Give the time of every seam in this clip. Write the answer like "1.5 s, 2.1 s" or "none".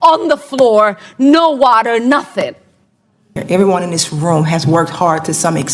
3.4 s